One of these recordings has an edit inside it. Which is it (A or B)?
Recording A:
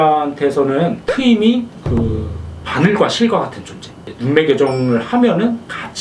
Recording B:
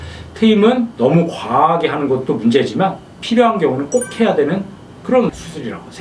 A